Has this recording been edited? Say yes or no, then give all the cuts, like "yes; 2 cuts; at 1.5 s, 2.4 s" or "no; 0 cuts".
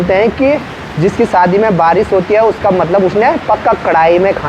no; 0 cuts